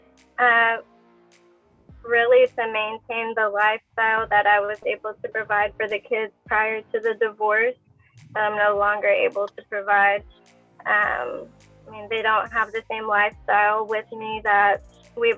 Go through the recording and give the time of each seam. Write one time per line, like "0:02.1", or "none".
0:07.9